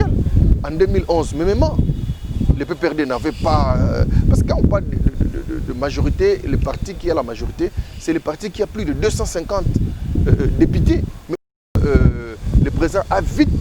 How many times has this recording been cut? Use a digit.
1